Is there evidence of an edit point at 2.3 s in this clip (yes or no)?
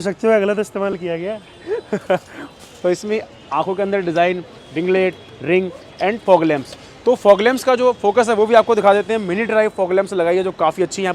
no